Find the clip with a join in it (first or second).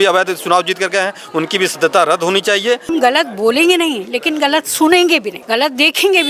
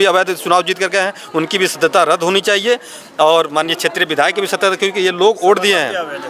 first